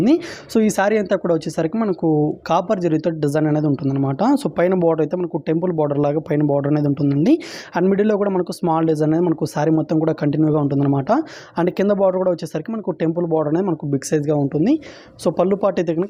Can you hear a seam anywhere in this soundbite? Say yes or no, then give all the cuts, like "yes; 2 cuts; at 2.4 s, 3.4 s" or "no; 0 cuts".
no; 0 cuts